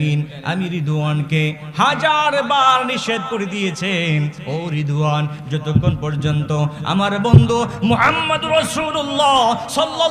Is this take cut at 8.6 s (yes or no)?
no